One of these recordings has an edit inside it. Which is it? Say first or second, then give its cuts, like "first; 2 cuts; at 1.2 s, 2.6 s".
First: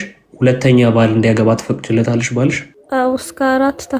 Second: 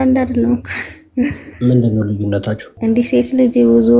second; 2 cuts; at 1.5 s, 2.7 s